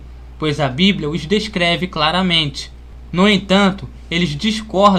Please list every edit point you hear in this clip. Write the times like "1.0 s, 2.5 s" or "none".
none